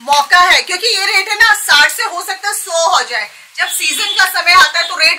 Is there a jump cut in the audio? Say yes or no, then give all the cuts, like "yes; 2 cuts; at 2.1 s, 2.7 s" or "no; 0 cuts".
no; 0 cuts